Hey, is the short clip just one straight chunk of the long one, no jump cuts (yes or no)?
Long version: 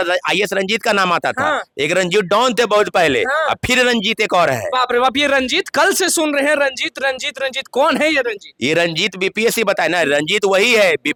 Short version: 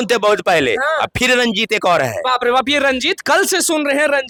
yes